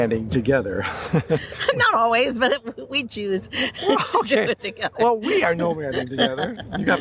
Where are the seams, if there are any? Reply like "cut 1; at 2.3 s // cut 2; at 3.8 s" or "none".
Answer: none